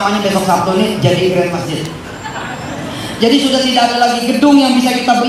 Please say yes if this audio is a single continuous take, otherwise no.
yes